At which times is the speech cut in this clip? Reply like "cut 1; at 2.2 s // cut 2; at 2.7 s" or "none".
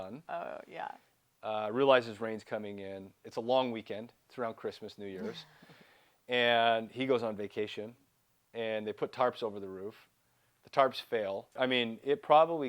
cut 1; at 1.1 s // cut 2; at 11.5 s